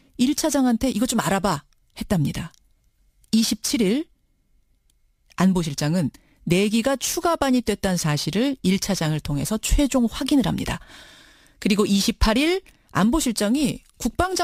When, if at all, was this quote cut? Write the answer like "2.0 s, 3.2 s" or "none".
none